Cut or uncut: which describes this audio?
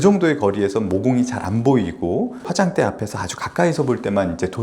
cut